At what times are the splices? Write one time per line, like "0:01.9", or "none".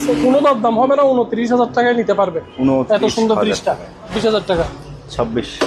0:04.1